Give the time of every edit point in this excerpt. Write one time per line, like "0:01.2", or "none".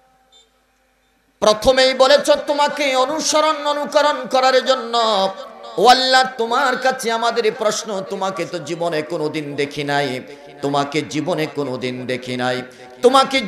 none